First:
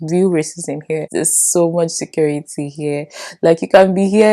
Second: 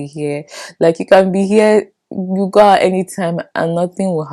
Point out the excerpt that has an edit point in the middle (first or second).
first